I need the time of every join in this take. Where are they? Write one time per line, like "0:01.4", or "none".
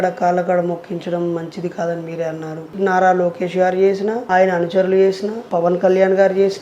0:02.7
0:04.2
0:05.3